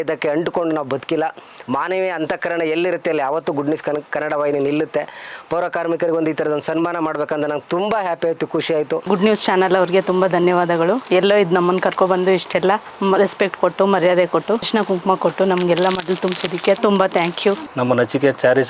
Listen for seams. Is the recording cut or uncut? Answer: cut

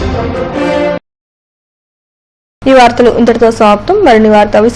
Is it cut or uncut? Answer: uncut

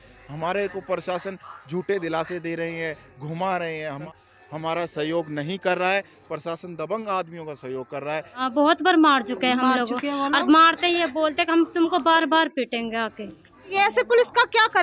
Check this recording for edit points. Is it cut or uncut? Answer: cut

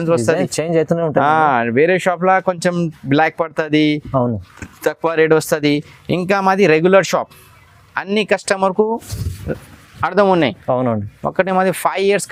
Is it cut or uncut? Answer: uncut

